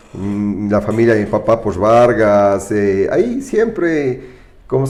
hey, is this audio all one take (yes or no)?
yes